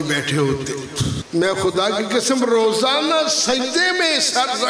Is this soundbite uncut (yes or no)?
no